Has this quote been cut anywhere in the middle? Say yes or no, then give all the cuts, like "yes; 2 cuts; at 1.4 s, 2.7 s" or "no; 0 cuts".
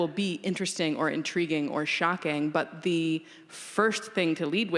no; 0 cuts